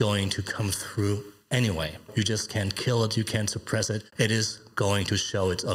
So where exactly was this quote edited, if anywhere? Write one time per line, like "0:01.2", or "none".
0:02.1
0:04.1